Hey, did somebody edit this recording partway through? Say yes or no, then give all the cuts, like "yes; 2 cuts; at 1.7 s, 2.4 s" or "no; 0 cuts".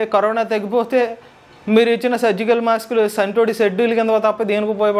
no; 0 cuts